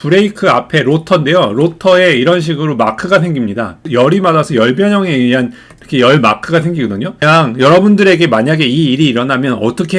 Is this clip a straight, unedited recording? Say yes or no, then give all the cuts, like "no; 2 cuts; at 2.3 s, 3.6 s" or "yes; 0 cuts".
no; 2 cuts; at 3.9 s, 7.2 s